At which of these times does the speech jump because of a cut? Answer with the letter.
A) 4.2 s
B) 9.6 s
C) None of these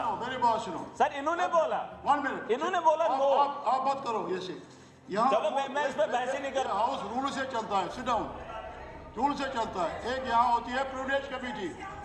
C